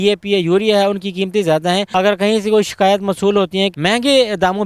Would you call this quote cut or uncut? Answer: cut